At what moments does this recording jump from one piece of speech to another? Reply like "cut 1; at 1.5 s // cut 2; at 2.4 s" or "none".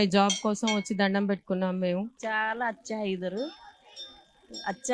cut 1; at 2.2 s